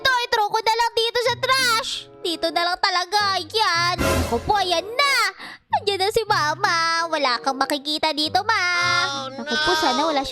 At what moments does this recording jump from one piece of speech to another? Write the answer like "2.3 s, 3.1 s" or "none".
4.0 s, 9.2 s

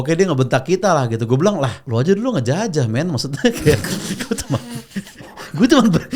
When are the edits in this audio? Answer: 1.8 s

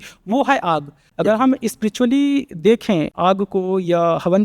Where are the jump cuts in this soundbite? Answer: 1.0 s, 3.1 s

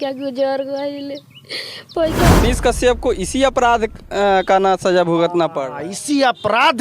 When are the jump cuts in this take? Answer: 2.4 s

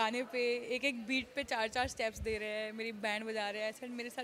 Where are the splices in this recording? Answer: none

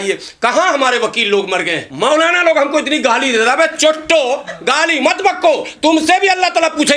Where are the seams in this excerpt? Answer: 1.8 s

